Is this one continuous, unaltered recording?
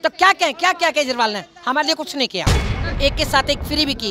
no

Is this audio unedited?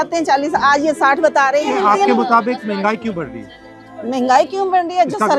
yes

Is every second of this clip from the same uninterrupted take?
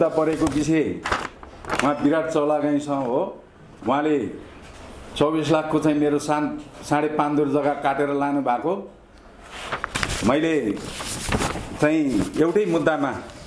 yes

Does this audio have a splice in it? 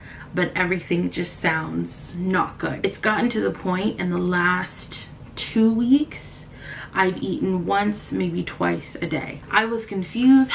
no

